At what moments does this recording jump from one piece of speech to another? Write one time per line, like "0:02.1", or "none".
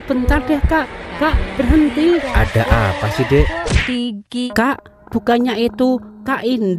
0:04.5